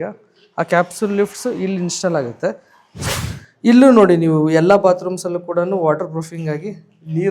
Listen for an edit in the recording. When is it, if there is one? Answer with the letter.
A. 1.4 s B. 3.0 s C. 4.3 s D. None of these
B